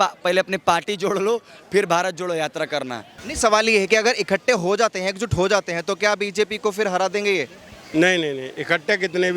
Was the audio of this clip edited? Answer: yes; 1 cut; at 3.1 s

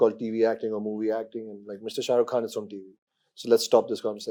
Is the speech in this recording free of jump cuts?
yes; 0 cuts

